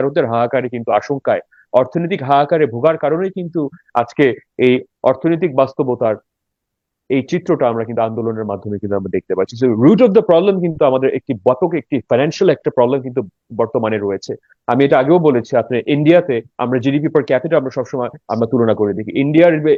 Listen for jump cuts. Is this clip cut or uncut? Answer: uncut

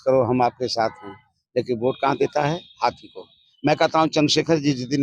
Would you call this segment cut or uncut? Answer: cut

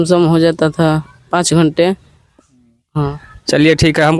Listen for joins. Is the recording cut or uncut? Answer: uncut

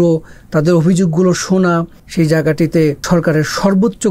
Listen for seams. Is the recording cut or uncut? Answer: cut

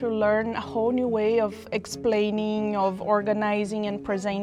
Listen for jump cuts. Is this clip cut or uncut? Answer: uncut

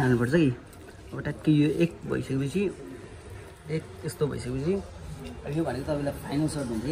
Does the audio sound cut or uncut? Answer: uncut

